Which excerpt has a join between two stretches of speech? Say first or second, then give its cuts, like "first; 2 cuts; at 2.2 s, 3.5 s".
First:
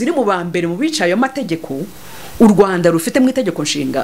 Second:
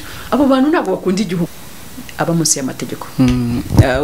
second; 1 cut; at 1.5 s